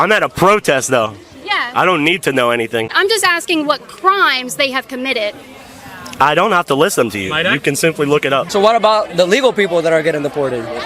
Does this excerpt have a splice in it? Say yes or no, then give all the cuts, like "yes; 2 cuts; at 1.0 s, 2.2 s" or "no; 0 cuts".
yes; 2 cuts; at 2.9 s, 8.5 s